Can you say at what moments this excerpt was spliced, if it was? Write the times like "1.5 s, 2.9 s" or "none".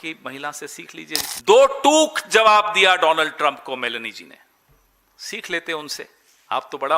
1.2 s